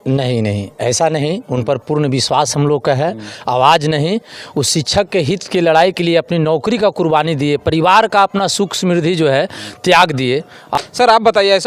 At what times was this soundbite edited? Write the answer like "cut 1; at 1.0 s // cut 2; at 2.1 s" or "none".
cut 1; at 10.6 s